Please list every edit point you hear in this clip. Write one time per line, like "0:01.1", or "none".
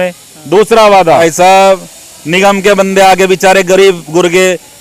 0:01.2